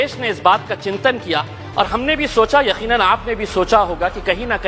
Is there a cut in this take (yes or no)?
no